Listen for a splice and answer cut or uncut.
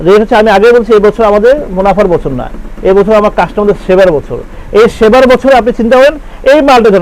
uncut